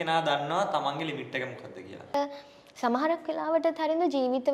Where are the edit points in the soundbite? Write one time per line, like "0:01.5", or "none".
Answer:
0:02.1